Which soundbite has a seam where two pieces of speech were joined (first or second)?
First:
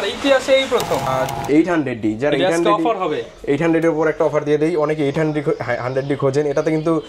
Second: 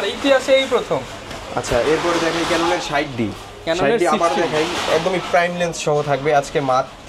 first